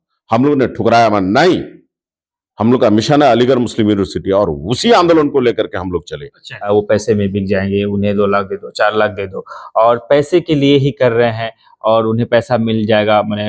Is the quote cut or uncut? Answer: cut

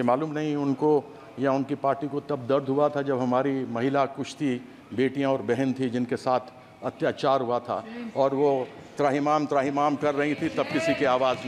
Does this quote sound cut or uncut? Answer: uncut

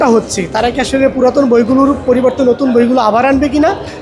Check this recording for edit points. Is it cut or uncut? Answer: uncut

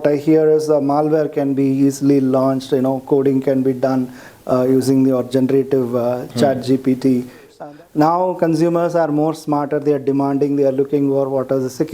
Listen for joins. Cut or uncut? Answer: cut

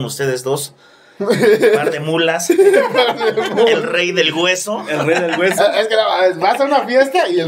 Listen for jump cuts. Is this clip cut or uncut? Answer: uncut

